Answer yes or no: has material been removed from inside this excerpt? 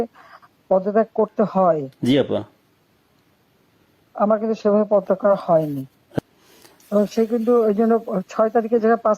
yes